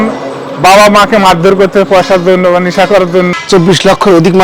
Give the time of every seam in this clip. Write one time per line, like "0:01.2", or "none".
0:03.3